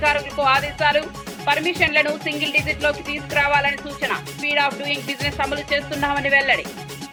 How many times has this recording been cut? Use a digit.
0